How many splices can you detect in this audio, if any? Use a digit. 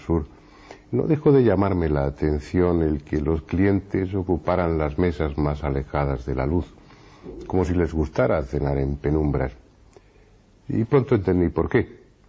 0